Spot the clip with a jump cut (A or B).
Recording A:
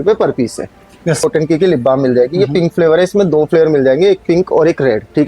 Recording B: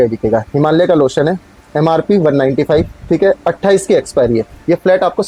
A